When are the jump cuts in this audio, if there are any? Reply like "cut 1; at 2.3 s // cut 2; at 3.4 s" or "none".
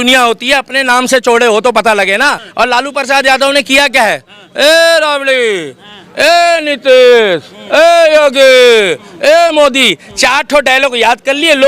cut 1; at 2.4 s